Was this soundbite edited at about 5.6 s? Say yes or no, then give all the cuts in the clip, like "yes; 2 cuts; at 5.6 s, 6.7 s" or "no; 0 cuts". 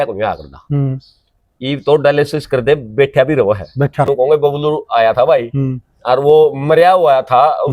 no; 1 cut; at 4.1 s